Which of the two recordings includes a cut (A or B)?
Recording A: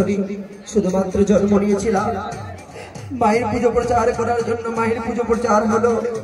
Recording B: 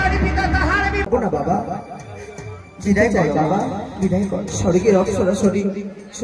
B